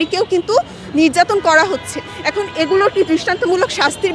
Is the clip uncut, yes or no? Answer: yes